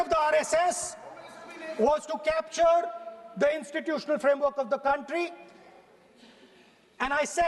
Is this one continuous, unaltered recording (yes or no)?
yes